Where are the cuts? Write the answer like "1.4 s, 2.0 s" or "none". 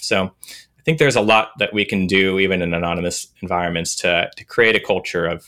none